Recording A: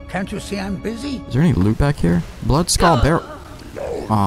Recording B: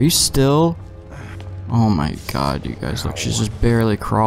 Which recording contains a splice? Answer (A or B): A